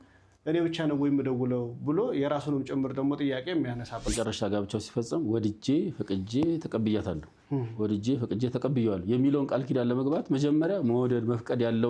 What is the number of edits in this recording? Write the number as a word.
one